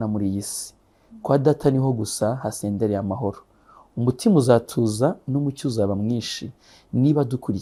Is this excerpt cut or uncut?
uncut